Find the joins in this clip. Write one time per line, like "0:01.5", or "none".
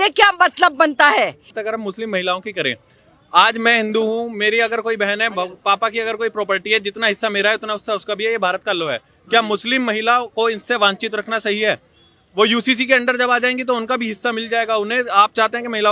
0:01.6